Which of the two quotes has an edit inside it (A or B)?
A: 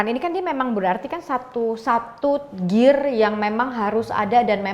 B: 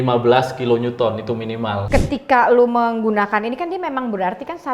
B